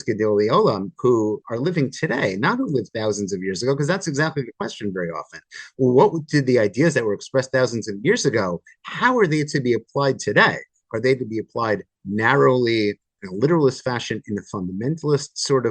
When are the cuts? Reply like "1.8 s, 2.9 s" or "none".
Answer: 13.1 s